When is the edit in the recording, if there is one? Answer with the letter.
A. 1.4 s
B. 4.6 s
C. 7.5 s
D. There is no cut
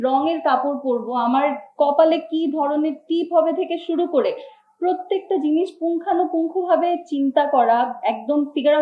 D